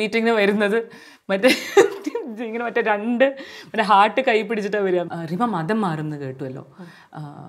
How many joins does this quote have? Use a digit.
1